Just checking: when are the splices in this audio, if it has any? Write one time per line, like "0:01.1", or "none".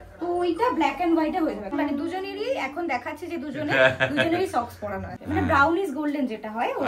0:01.7
0:05.0

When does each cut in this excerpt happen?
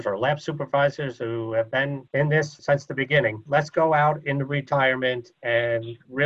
0:02.5

